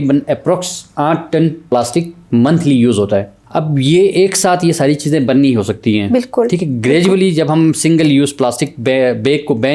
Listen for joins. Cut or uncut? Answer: cut